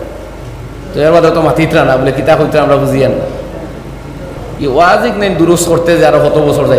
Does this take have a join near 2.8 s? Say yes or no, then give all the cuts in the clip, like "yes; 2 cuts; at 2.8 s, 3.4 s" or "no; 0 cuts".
no; 1 cut; at 4.4 s